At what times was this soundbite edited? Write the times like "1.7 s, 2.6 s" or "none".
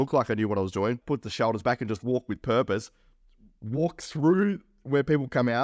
1.0 s